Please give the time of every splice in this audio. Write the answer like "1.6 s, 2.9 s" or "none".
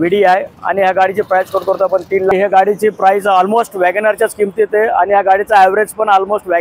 2.3 s